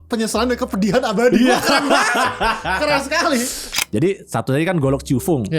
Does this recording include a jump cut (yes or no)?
yes